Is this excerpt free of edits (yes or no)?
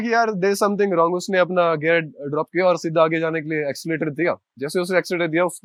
yes